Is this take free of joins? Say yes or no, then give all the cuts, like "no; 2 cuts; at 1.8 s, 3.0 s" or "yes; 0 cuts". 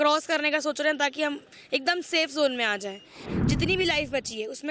no; 1 cut; at 3.3 s